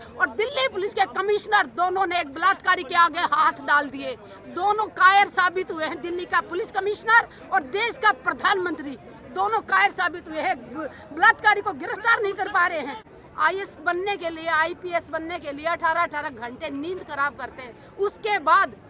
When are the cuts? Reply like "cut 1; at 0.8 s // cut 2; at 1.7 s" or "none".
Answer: cut 1; at 12.7 s